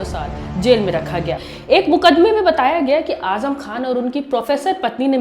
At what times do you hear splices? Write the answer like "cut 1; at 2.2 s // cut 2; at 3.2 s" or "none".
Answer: cut 1; at 1.4 s